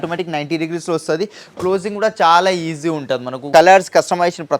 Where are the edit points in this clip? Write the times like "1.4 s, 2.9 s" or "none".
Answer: 3.3 s

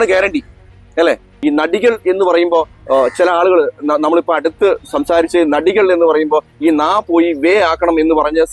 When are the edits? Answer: 1.3 s

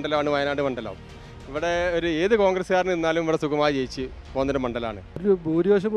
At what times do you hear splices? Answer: 5.1 s

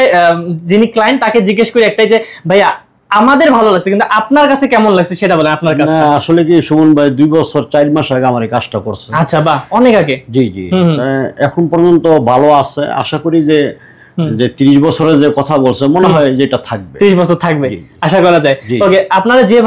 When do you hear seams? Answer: none

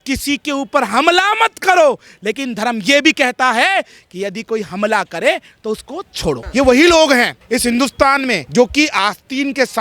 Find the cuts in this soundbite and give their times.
6.4 s, 7.4 s, 8.4 s

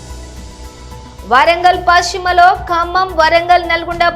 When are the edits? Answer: 1.1 s

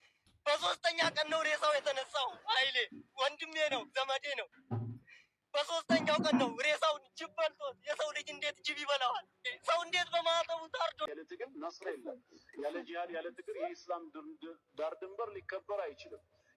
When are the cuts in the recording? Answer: 11.1 s

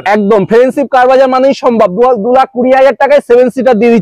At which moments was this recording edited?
none

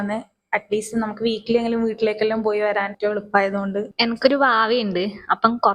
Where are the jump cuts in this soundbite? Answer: 2.9 s, 3.9 s

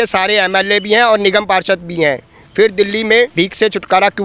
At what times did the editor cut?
none

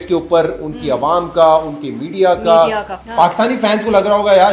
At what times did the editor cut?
2.9 s

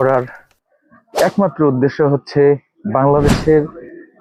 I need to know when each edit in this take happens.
none

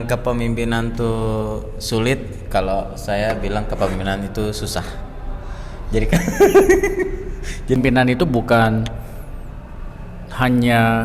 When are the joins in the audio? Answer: 7.8 s

